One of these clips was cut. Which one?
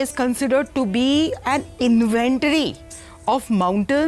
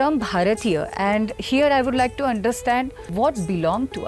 second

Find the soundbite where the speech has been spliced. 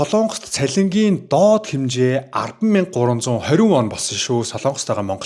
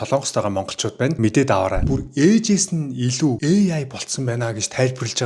second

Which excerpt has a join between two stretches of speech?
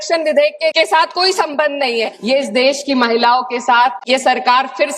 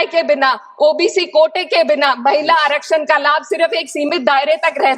first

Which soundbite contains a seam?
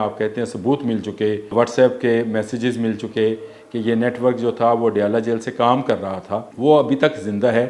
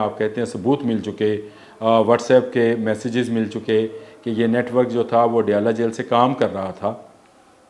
first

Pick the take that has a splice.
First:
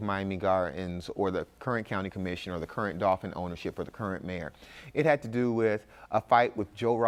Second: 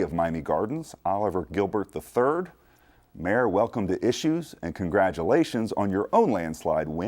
second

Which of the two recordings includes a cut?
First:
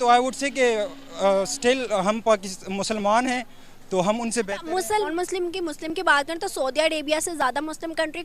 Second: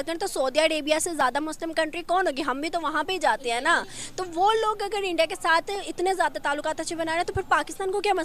first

